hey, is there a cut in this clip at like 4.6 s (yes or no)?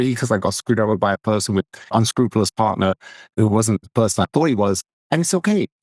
no